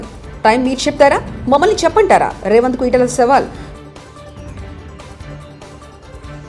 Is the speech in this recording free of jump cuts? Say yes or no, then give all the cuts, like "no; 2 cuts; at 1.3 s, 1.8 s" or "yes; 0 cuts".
yes; 0 cuts